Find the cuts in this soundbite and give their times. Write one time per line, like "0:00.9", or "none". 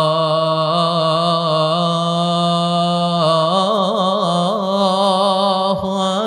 none